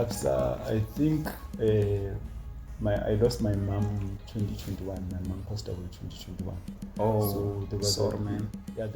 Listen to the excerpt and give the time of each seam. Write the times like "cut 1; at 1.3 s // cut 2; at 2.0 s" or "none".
none